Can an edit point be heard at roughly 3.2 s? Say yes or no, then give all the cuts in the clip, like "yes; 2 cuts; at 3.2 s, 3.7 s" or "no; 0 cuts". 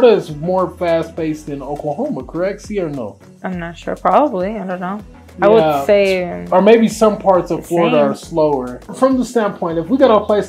no; 0 cuts